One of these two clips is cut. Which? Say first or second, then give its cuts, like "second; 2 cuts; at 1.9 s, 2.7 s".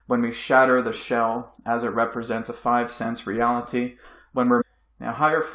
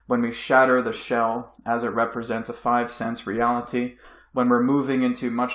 second; 1 cut; at 4.6 s